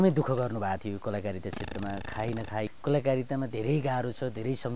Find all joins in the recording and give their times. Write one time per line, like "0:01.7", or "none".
0:02.7